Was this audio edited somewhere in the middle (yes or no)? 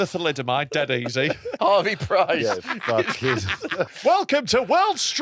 yes